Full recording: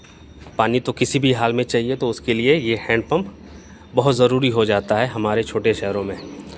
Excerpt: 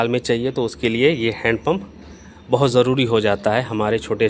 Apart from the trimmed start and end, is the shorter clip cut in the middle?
no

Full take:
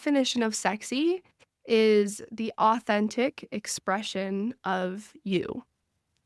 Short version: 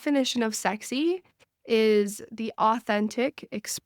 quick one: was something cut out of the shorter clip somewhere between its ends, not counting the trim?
no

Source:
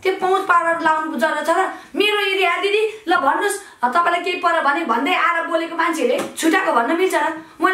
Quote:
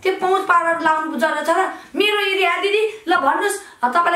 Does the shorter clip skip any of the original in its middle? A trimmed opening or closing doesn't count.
no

